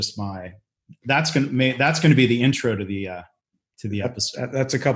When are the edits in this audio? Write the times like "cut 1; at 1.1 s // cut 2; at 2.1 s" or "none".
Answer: cut 1; at 4.0 s